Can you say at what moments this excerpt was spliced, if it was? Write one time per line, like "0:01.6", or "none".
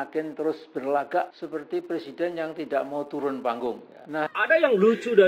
0:04.3